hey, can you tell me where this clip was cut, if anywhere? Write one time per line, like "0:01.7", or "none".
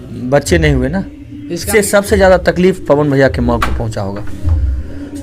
0:01.6